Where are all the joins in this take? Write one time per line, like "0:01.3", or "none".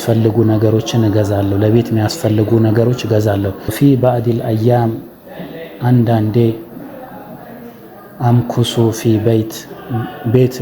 0:03.7